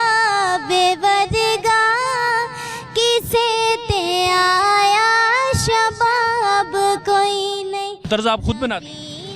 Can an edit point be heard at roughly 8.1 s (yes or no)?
yes